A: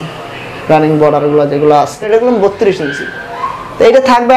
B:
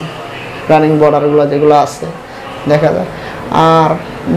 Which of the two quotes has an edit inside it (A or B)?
A